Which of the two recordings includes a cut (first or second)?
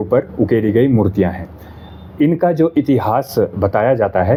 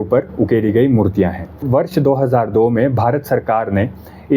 second